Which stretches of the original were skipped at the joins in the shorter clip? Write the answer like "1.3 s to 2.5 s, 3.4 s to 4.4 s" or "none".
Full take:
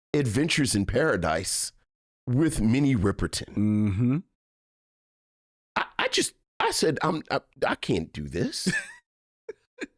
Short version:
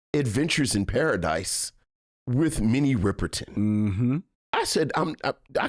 4.4 s to 6.4 s